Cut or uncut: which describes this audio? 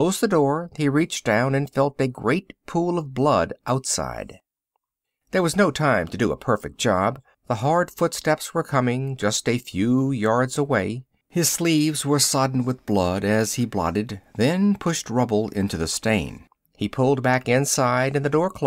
uncut